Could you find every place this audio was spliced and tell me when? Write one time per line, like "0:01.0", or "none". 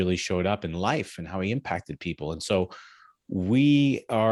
none

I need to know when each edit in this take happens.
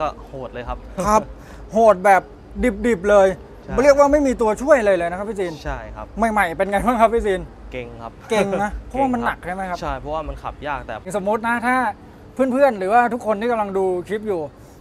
0:11.1

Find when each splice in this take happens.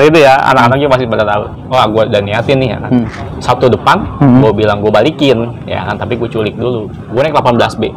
0:01.6
0:03.2
0:07.0

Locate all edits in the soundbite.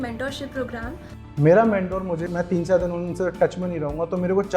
0:02.3

